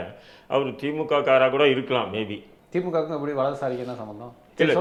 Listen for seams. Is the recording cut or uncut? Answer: uncut